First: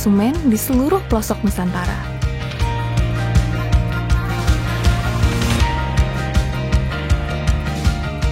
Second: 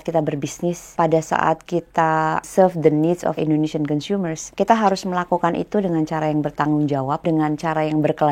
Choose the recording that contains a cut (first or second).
second